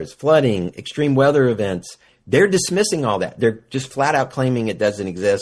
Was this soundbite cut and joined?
yes; 1 cut; at 2.1 s

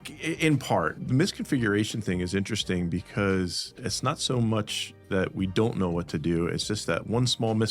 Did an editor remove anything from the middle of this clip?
yes; 1 cut; at 1.0 s

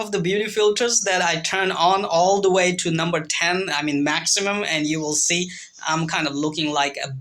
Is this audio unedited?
yes; 0 cuts

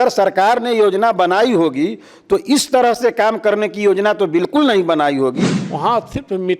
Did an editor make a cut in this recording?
yes; 1 cut; at 5.6 s

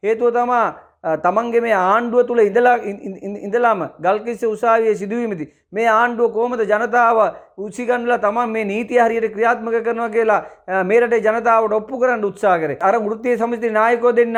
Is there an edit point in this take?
no; 0 cuts

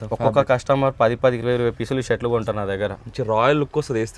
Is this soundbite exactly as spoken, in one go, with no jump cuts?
yes; 0 cuts

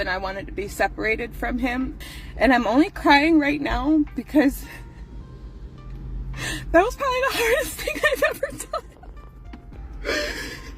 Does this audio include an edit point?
yes; 1 cut; at 2.0 s

